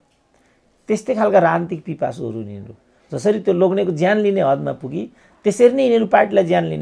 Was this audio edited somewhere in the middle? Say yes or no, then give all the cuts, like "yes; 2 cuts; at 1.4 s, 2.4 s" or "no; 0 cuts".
no; 0 cuts